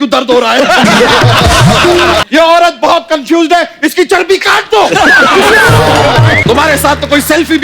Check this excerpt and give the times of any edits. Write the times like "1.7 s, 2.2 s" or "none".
2.2 s, 6.4 s